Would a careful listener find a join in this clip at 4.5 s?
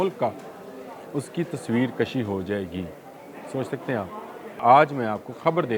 yes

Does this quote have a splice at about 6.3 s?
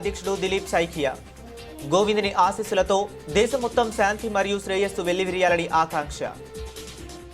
yes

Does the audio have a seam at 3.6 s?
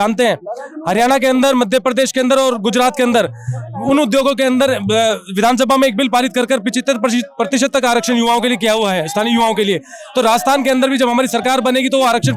no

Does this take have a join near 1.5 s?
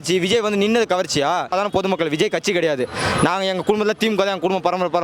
yes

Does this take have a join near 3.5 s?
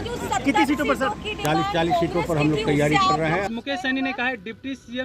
yes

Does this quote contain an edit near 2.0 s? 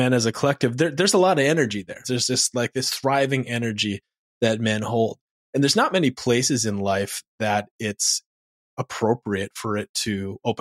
yes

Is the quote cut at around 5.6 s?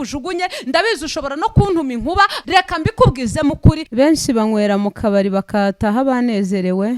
no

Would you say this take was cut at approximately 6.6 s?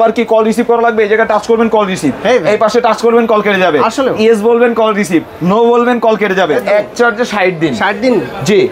yes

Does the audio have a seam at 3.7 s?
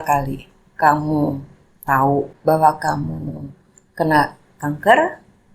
no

